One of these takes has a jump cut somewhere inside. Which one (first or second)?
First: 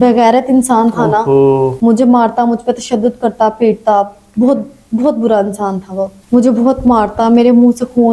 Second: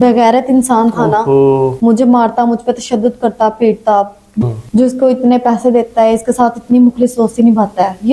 second